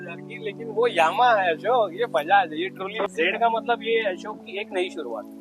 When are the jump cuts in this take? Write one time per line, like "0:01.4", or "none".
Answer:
0:03.1

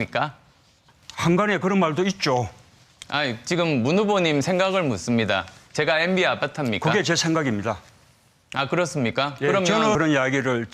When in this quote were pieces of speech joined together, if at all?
0:07.9

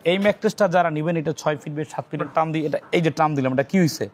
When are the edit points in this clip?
0:02.2

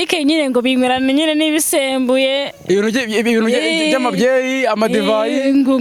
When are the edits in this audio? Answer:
none

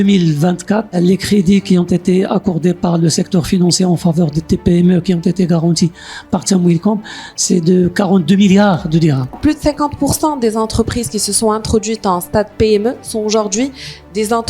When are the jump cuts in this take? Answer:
0:00.9
0:09.4

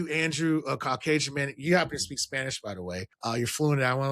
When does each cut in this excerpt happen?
0:03.1

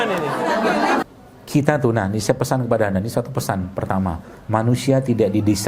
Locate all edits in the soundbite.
0:01.0

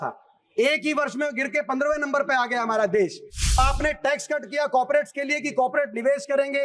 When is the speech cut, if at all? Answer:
0:03.6

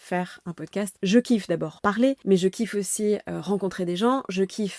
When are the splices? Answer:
0:00.9
0:01.9

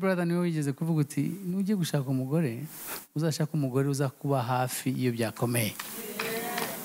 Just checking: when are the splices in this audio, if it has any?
none

